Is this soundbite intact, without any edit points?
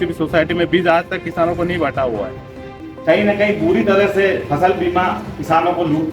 no; 1 cut; at 2.7 s

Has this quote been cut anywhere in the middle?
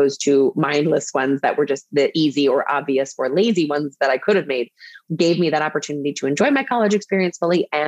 yes; 1 cut; at 5.0 s

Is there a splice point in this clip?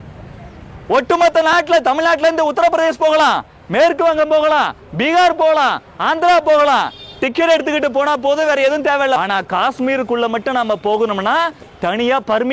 yes; 1 cut; at 9.2 s

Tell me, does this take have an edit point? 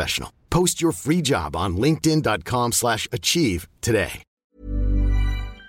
yes; 1 cut; at 4.4 s

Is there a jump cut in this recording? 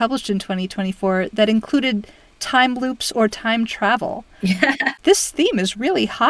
yes; 1 cut; at 4.9 s

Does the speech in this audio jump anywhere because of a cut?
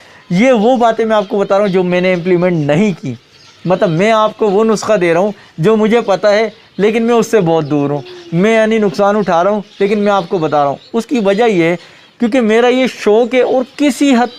no; 0 cuts

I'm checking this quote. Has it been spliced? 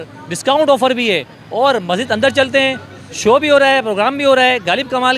yes; 1 cut; at 1.3 s

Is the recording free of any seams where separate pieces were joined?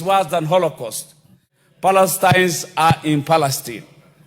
no; 1 cut; at 1.5 s

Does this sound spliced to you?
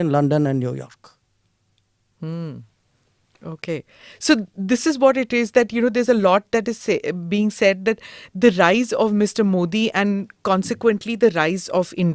no; 0 cuts

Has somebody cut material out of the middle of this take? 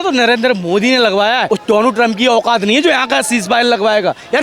yes; 1 cut; at 1.4 s

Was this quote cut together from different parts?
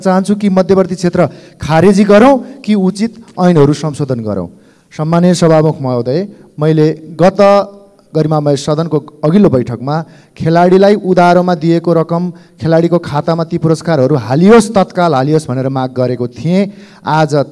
no; 0 cuts

